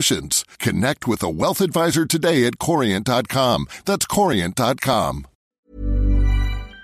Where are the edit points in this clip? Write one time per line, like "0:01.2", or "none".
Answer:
0:05.6